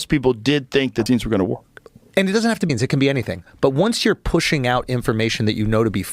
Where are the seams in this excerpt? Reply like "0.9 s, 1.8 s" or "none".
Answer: 1.0 s, 2.7 s